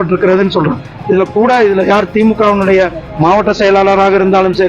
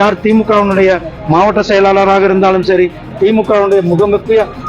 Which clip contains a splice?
first; 1 cut; at 0.9 s

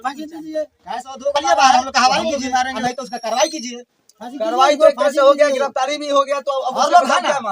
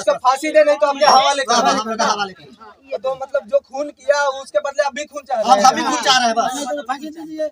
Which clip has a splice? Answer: first; 1 cut; at 1.6 s

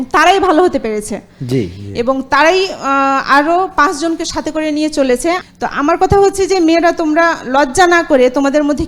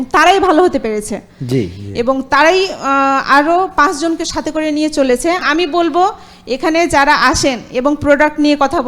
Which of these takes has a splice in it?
second; 1 cut; at 5.4 s

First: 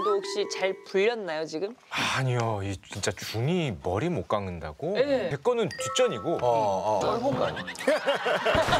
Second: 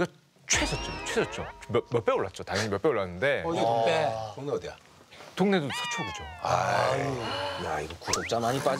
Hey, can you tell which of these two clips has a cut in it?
first; 3 cuts; at 1.8 s, 5.3 s, 7.0 s

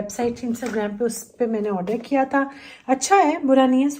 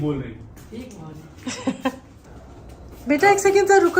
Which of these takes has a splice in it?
second; 1 cut; at 2.1 s

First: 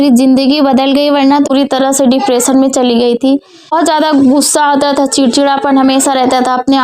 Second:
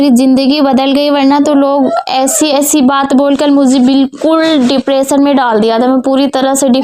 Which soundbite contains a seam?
first; 2 cuts; at 1.5 s, 3.7 s

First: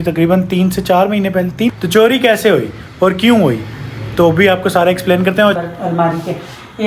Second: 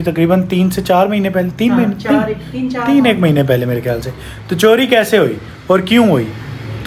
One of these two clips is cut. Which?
first; 2 cuts; at 1.7 s, 5.6 s

